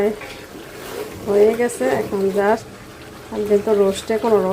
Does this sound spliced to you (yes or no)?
yes